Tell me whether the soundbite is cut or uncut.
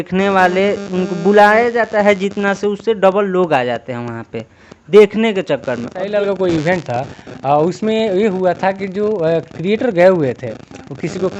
cut